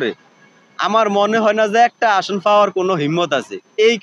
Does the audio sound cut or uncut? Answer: uncut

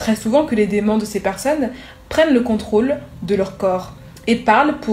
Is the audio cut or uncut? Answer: uncut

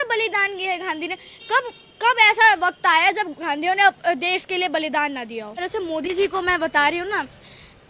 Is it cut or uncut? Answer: cut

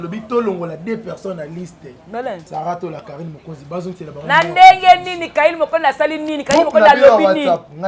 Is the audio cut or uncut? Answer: cut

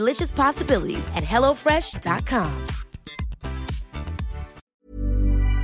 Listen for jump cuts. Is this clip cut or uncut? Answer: cut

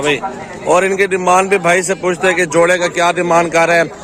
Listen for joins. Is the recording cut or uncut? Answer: uncut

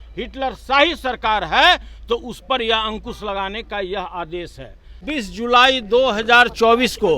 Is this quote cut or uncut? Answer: cut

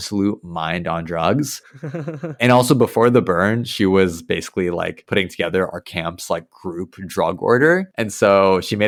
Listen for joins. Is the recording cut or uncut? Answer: uncut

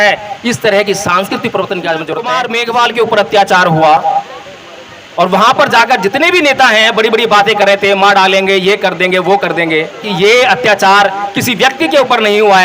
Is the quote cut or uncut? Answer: cut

